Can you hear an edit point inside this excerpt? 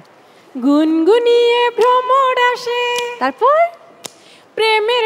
no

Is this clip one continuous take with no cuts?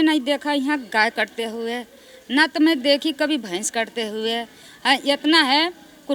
yes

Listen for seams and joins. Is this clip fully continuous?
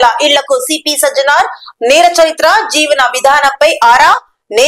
yes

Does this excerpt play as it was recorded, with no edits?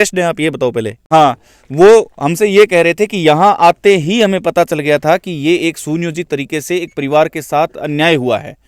no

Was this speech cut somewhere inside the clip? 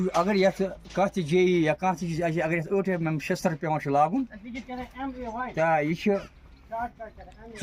no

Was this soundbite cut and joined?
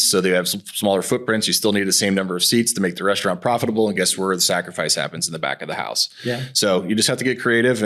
no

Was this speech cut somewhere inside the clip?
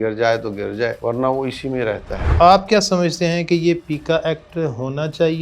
yes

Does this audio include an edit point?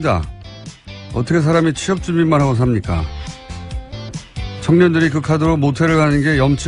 yes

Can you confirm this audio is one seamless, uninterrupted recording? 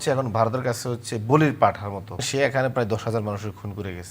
no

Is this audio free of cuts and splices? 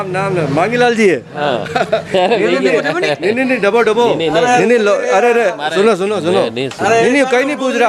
yes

